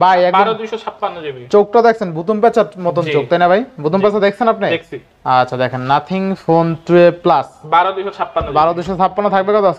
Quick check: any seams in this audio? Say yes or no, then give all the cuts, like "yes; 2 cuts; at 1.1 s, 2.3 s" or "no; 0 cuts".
no; 0 cuts